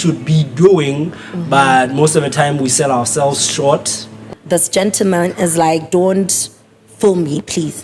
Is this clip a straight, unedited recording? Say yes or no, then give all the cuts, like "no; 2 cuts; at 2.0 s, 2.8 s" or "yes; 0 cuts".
no; 1 cut; at 4.3 s